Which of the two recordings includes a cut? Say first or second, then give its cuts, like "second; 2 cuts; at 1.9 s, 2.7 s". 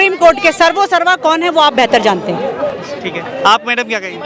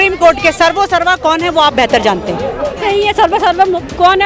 second; 1 cut; at 2.8 s